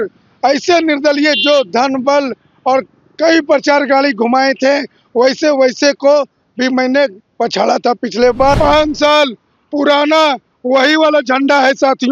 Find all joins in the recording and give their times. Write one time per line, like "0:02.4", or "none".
0:08.5